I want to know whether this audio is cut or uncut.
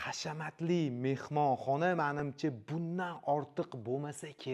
uncut